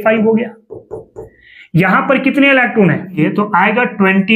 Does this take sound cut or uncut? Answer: cut